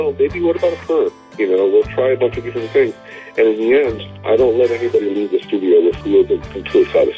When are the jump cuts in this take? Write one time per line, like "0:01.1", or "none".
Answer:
0:06.0